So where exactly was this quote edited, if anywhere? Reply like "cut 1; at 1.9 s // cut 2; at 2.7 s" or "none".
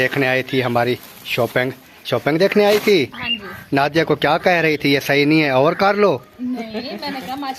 none